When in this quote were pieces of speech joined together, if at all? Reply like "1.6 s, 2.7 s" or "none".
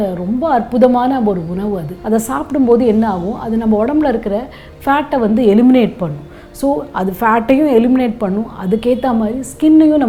none